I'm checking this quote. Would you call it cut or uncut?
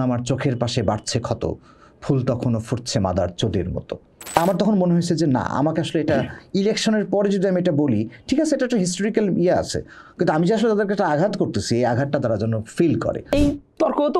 cut